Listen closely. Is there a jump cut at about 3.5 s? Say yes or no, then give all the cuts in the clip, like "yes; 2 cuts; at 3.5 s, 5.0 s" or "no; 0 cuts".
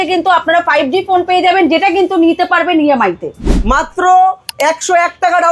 yes; 1 cut; at 3.5 s